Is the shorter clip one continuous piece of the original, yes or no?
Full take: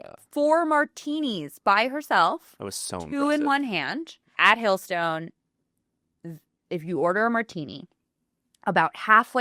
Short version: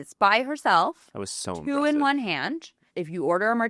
no